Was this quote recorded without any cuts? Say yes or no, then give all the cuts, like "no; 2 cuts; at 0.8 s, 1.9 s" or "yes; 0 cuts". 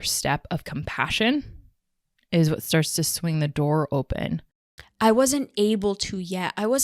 no; 1 cut; at 4.7 s